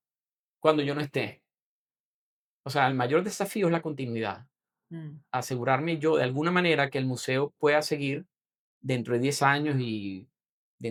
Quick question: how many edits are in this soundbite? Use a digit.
0